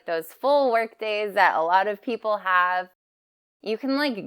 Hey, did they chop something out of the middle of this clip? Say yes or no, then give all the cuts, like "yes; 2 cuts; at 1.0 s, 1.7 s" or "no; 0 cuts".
yes; 1 cut; at 3.2 s